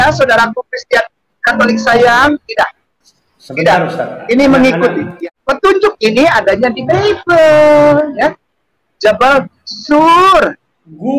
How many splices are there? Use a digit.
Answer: 1